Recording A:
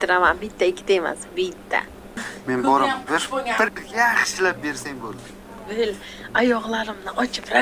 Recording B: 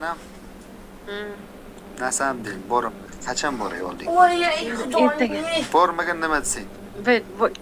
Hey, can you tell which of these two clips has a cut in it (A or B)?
A